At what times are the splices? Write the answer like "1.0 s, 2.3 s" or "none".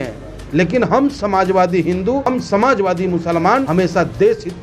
2.3 s, 3.7 s